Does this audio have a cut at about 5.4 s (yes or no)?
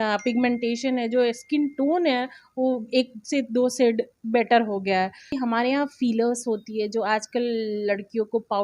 yes